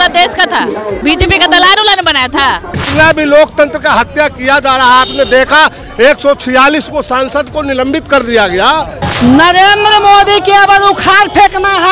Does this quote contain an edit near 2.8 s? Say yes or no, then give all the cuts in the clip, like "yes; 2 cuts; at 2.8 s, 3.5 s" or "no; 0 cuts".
yes; 3 cuts; at 1.0 s, 2.8 s, 9.1 s